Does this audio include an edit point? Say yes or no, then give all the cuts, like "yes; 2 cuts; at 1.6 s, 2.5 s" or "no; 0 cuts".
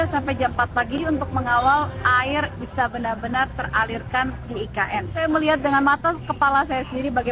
no; 0 cuts